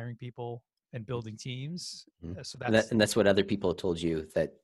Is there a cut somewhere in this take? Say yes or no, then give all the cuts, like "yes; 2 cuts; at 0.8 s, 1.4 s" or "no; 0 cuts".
no; 0 cuts